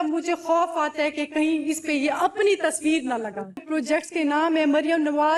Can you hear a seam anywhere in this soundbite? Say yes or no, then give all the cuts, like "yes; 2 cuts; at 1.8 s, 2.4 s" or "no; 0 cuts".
yes; 1 cut; at 3.6 s